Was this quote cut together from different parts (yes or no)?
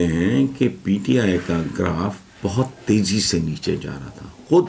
no